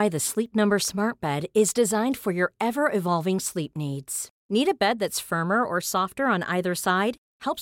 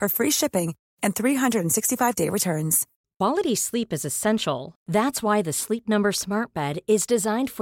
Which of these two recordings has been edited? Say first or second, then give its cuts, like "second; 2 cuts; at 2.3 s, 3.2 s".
second; 1 cut; at 2.9 s